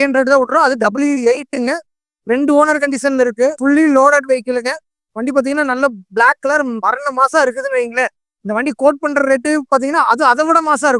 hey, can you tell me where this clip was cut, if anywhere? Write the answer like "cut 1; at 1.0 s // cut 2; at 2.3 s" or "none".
none